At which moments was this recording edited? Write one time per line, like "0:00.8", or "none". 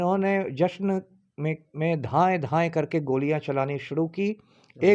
none

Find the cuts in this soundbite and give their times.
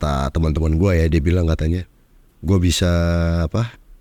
none

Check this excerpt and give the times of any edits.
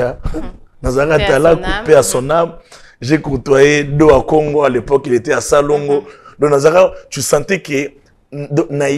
none

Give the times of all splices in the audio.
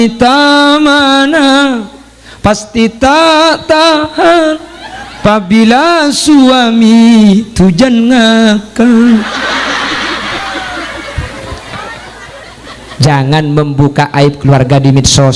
0:12.4

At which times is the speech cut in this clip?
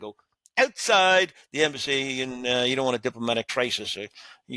0:03.5

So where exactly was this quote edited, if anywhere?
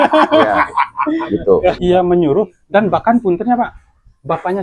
0:01.6

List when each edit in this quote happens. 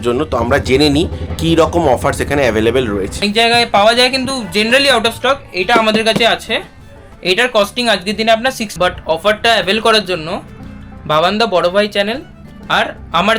0:03.2
0:08.7

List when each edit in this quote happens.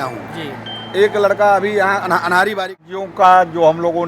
0:02.8

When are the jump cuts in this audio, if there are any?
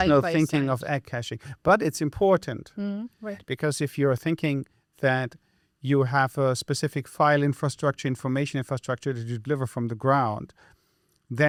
none

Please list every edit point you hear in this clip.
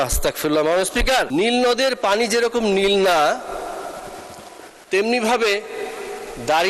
0:01.3

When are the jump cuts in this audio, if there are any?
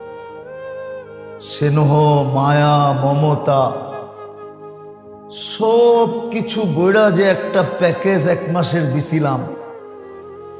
0:09.5

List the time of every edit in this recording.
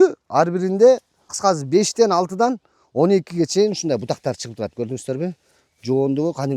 0:01.3

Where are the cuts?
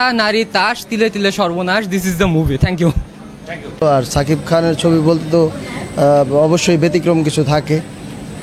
none

